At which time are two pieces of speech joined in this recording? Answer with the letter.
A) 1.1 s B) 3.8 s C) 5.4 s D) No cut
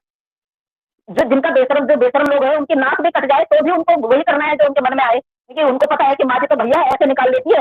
C